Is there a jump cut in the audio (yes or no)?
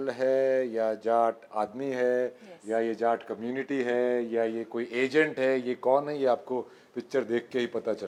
no